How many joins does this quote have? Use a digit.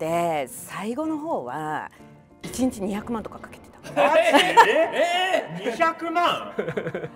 0